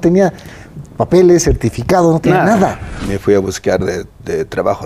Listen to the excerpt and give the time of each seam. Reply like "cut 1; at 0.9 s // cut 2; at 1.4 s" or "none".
cut 1; at 2.9 s